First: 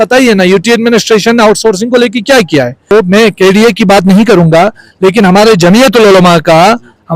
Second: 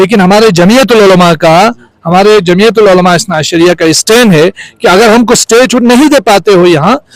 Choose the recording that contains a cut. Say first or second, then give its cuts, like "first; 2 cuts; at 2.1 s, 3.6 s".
first; 1 cut; at 2.9 s